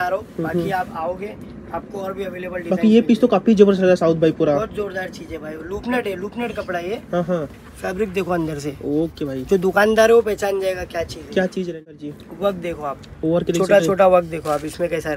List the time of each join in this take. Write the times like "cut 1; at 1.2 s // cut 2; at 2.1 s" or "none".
cut 1; at 12.0 s